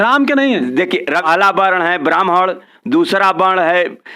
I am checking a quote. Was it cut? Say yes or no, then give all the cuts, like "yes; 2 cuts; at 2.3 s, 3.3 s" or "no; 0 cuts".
yes; 1 cut; at 1.2 s